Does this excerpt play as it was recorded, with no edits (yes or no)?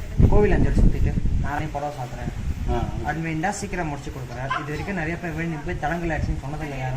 no